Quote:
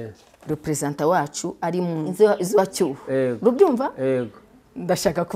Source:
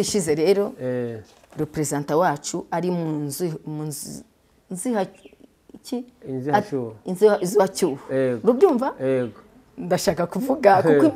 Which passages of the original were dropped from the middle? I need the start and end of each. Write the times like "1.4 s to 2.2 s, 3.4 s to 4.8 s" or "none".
3.2 s to 7.1 s